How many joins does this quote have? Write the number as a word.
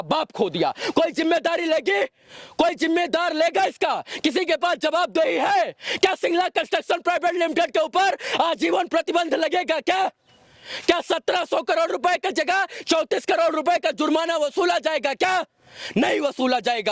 zero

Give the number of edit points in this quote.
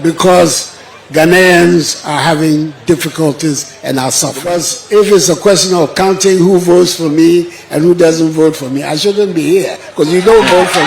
one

